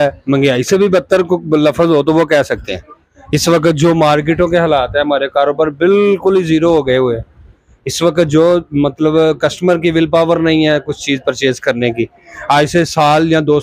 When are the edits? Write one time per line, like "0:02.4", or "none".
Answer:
none